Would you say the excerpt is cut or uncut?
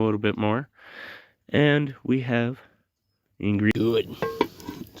cut